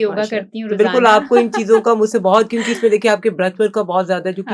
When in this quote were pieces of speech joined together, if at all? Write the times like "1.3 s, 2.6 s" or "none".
none